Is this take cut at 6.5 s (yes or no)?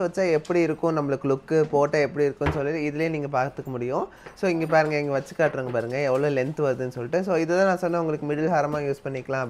no